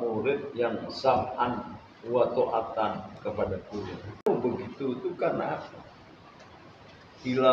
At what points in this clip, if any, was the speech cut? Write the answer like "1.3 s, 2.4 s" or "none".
4.3 s